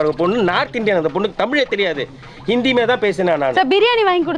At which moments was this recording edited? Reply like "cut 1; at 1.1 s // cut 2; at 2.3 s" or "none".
none